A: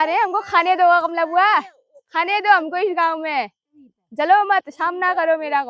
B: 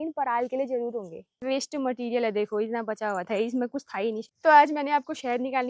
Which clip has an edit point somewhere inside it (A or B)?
B